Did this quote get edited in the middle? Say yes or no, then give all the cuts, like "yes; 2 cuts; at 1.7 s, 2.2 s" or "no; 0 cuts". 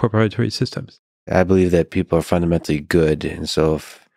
yes; 1 cut; at 1.3 s